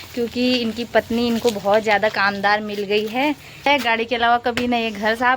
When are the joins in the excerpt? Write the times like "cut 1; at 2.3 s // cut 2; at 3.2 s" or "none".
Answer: cut 1; at 3.7 s